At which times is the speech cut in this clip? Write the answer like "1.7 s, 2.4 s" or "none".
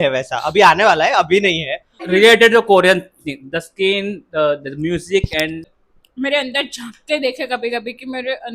1.9 s, 5.8 s